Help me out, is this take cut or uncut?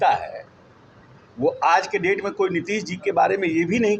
uncut